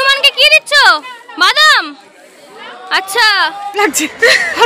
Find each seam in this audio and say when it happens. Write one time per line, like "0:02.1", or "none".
0:03.7